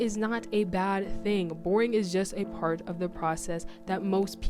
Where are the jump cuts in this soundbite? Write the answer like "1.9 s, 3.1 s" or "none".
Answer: none